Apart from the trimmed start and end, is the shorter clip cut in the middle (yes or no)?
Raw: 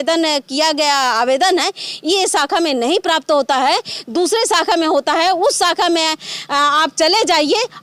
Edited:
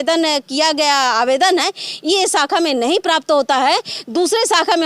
no